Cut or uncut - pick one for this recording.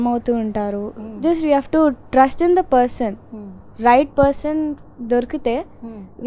uncut